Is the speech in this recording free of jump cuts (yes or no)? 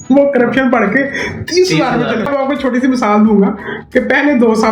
no